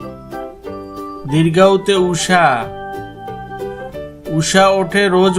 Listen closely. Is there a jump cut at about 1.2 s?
no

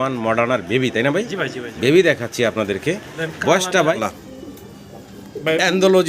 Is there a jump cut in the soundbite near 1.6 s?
no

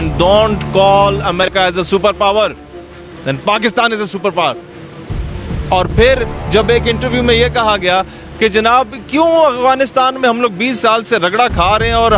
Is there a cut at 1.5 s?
yes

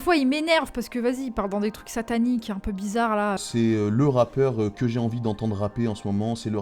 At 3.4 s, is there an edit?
yes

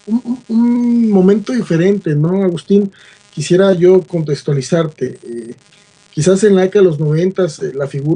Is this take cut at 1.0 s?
no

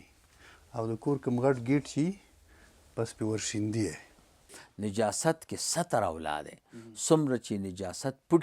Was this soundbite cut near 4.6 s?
yes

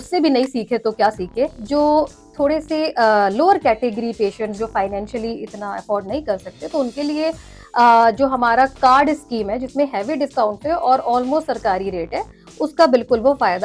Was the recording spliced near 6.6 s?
no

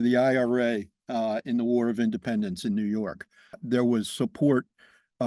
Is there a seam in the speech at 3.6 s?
yes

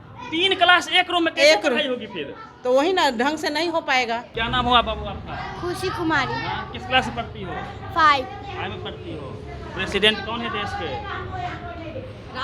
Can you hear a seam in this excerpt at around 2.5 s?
no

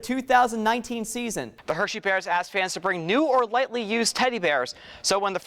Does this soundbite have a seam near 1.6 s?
yes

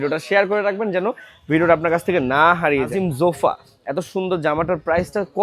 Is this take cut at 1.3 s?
no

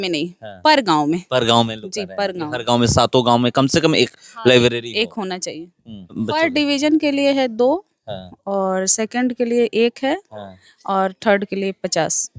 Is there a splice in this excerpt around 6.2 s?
yes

